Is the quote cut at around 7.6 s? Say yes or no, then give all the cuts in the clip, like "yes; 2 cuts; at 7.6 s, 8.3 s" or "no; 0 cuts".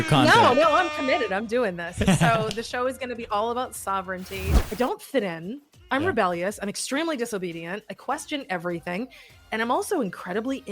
no; 1 cut; at 4.6 s